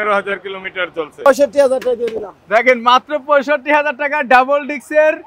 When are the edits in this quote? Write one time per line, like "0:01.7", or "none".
0:01.3